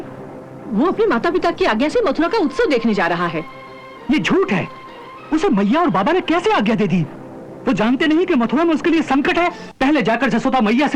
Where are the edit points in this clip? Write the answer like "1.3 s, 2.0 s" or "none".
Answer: 9.6 s